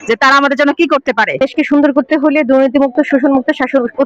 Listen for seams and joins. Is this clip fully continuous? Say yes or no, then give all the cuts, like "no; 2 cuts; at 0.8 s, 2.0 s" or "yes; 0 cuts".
no; 1 cut; at 1.4 s